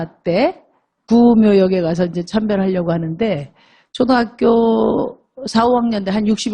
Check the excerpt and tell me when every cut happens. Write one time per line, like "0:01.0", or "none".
0:03.8